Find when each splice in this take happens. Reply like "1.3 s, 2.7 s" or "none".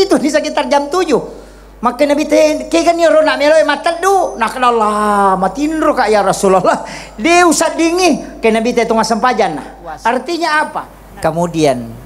11.0 s